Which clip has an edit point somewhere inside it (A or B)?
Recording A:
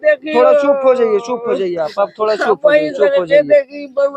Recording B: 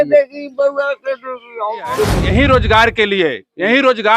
B